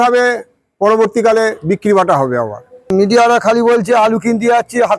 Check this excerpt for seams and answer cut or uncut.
cut